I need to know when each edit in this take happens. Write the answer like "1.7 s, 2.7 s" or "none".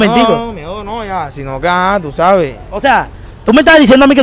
none